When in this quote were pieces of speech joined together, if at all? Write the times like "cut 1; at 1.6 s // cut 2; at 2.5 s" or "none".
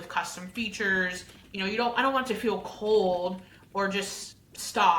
none